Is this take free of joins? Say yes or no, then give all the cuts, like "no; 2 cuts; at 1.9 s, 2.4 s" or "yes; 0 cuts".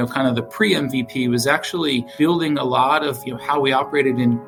yes; 0 cuts